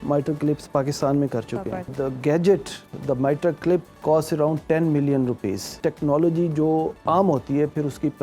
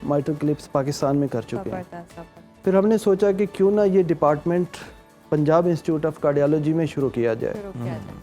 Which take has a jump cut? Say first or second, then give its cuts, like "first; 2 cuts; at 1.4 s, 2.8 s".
first; 4 cuts; at 1.9 s, 3.9 s, 5.7 s, 7.0 s